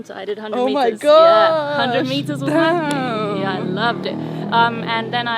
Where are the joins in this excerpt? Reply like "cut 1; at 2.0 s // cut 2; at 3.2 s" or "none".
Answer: none